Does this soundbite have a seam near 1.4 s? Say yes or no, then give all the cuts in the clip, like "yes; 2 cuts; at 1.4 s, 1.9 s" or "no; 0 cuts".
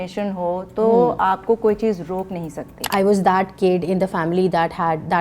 no; 1 cut; at 2.9 s